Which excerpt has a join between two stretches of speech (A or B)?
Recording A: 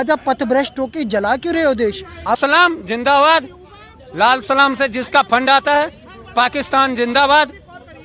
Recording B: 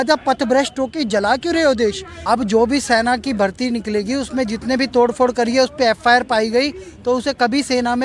A